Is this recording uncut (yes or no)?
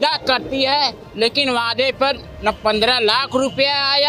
yes